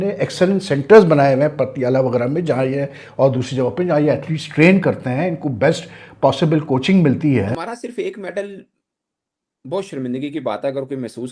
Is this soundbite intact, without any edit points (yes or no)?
no